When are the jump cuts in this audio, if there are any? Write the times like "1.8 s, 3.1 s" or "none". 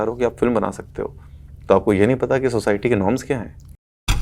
none